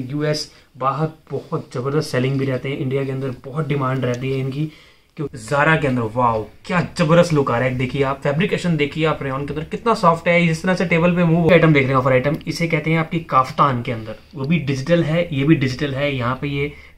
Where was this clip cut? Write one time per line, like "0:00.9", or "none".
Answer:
0:05.2
0:11.5